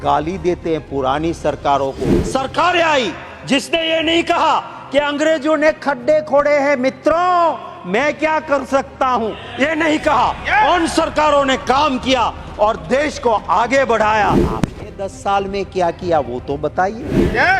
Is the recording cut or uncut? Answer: cut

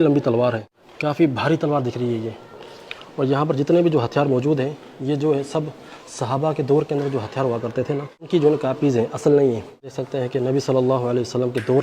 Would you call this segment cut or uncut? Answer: cut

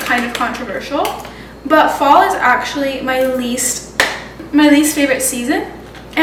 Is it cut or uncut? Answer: uncut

